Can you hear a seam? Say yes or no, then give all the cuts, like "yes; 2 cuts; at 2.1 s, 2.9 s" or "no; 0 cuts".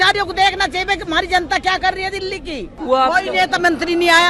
yes; 1 cut; at 2.7 s